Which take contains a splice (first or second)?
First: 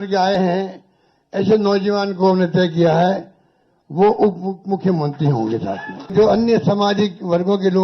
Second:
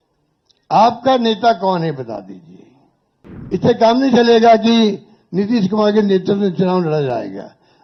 first